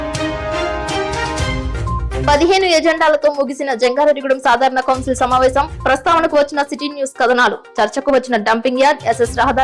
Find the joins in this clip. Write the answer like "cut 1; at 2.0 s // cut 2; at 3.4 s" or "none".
cut 1; at 2.2 s